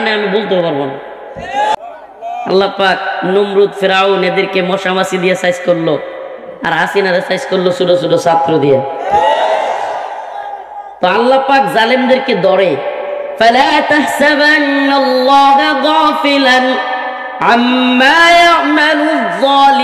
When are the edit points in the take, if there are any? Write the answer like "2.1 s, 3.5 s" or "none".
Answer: 1.8 s